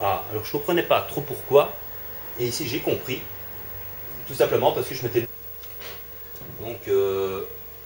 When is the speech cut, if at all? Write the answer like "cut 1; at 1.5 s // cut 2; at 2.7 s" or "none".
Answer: none